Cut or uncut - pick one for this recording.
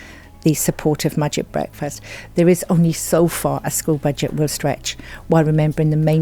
cut